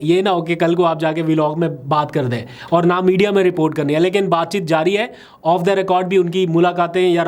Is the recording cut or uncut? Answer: uncut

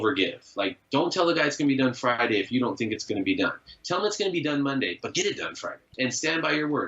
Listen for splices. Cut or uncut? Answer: cut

